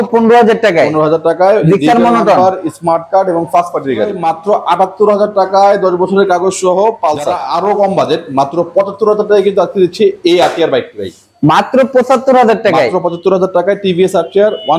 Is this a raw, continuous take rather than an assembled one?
no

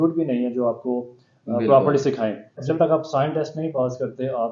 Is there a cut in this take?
yes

